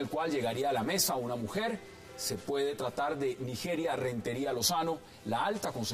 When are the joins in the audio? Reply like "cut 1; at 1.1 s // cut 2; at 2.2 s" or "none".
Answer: cut 1; at 1.9 s